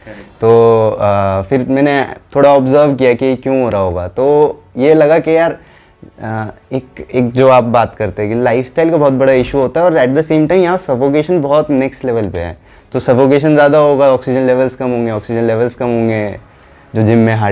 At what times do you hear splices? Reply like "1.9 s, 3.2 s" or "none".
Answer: none